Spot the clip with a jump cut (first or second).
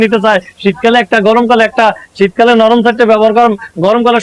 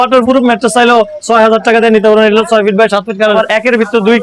second